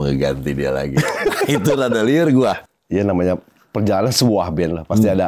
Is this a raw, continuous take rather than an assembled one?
no; 1 cut; at 2.6 s

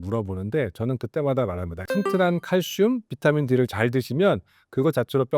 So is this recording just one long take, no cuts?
no; 1 cut; at 1.7 s

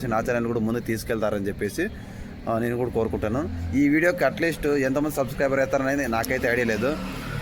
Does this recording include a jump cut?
no; 0 cuts

